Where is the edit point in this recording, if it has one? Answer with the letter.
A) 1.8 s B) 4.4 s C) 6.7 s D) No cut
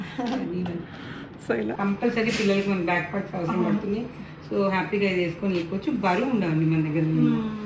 A